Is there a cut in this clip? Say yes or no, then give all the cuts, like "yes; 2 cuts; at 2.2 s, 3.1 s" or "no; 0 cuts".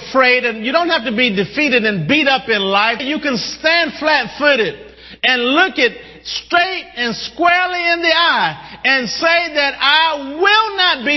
yes; 1 cut; at 3.0 s